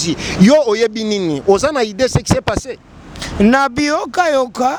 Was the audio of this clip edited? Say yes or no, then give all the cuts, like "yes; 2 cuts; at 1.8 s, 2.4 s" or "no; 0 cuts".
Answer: no; 0 cuts